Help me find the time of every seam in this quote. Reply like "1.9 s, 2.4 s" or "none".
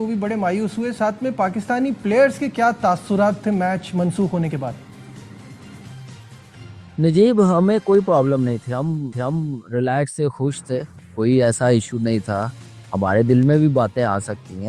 none